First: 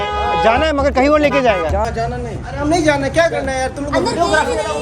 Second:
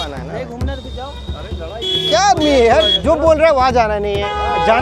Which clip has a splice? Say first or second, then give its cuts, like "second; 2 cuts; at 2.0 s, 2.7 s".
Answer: first; 1 cut; at 1.9 s